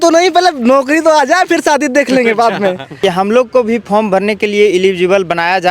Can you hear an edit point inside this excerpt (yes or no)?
yes